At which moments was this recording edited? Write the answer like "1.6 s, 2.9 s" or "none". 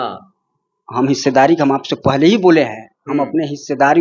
none